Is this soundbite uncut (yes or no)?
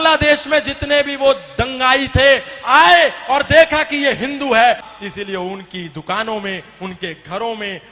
no